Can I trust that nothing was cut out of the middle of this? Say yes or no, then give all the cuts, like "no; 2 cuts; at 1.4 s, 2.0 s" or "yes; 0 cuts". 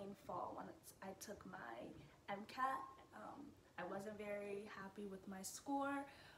yes; 0 cuts